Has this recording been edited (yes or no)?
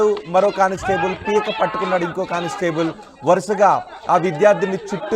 yes